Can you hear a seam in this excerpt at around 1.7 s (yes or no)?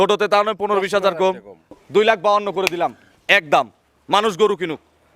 yes